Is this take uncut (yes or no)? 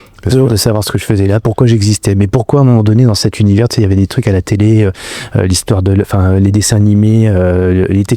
yes